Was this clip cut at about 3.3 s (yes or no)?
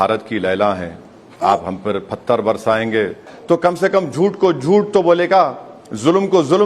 yes